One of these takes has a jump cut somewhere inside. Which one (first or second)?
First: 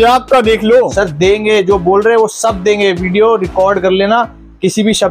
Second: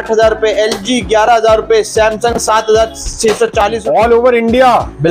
second